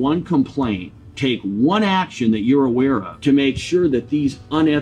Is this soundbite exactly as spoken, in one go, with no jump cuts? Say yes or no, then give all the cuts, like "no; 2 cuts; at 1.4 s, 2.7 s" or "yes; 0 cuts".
no; 1 cut; at 3.1 s